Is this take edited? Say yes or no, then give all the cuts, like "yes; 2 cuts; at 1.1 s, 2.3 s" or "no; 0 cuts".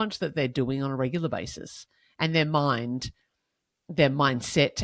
no; 0 cuts